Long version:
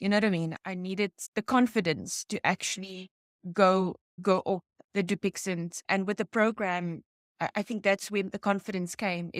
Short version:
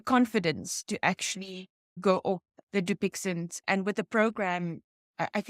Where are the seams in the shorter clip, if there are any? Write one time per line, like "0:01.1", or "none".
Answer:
0:01.8